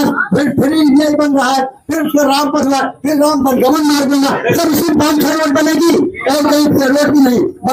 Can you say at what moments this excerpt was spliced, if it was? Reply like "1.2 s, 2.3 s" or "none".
none